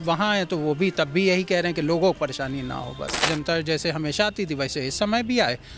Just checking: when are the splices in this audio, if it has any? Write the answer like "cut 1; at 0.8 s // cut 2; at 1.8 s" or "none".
cut 1; at 3.2 s